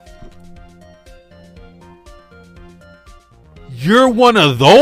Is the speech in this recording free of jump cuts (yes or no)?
yes